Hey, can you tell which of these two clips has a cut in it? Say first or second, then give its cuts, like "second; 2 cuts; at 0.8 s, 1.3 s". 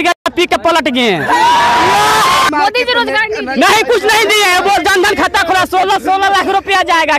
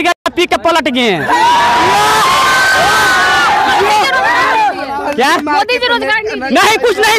first; 1 cut; at 2.5 s